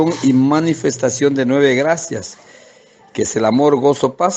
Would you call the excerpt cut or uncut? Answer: uncut